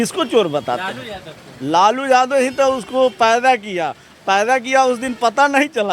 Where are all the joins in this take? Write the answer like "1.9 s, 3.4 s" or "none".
none